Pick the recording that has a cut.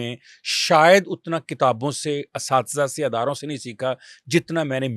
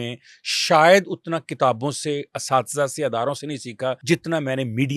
second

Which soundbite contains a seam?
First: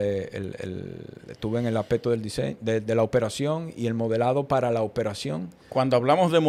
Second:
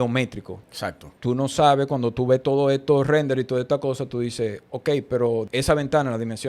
second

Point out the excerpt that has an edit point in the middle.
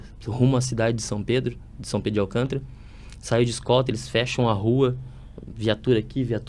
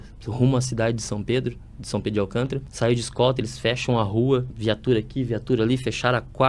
second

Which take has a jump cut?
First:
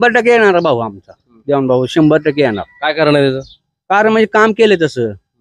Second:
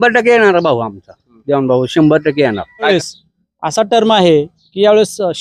second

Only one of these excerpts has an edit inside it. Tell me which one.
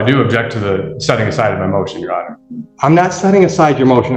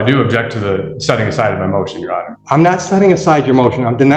second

